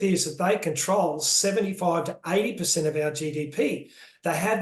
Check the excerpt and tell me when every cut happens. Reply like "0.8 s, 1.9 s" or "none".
none